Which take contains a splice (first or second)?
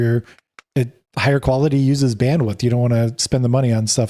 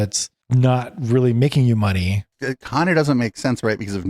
second